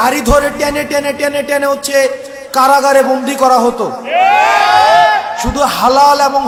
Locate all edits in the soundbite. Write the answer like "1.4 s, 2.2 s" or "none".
none